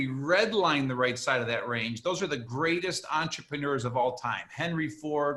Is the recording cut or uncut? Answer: uncut